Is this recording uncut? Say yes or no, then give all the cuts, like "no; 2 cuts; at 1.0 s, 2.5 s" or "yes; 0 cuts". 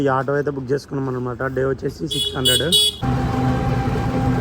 no; 1 cut; at 2.9 s